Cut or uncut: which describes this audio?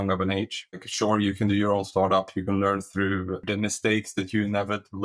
cut